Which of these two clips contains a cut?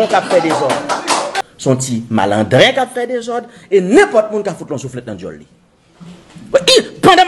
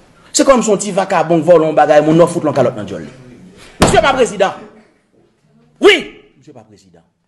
first; 1 cut; at 1.3 s

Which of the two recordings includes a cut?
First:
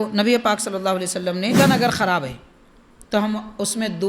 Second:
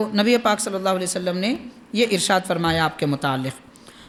first; 1 cut; at 1.6 s

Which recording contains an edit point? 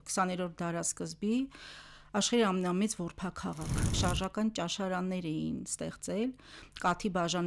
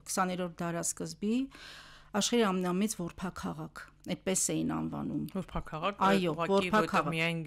first; 1 cut; at 4.0 s

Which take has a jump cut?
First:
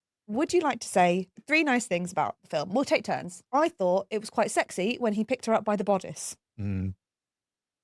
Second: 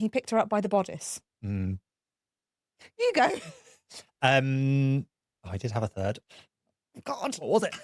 first; 1 cut; at 3.3 s

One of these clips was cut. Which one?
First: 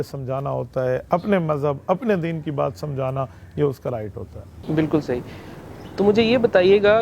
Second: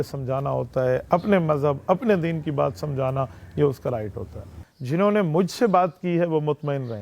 second; 1 cut; at 4.5 s

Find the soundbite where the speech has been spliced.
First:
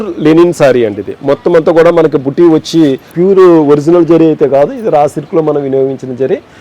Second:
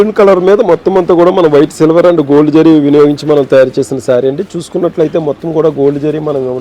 first; 1 cut; at 3.1 s

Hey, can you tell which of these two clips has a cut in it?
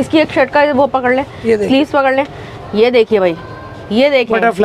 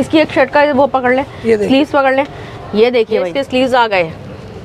second; 1 cut; at 3.4 s

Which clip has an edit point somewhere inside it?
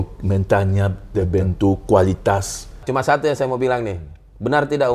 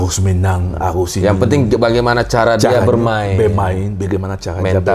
first; 1 cut; at 2.8 s

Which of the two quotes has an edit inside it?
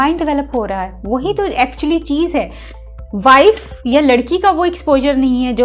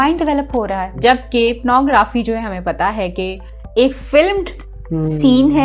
second; 1 cut; at 0.9 s

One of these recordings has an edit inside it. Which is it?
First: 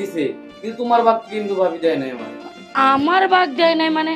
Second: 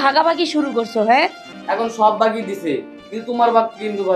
second; 1 cut; at 1.5 s

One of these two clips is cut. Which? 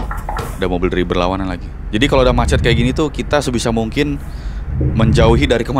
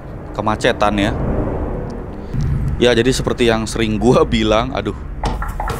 second; 1 cut; at 2.3 s

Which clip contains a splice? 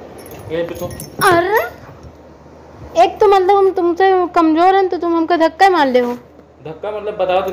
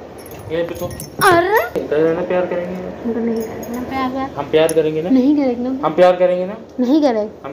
second; 1 cut; at 1.8 s

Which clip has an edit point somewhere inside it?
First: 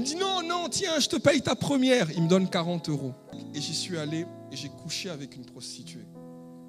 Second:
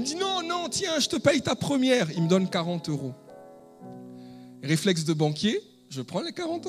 first; 1 cut; at 3.4 s

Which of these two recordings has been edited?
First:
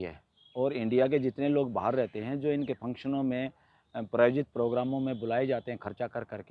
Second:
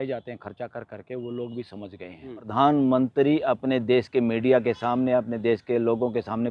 second; 1 cut; at 2.5 s

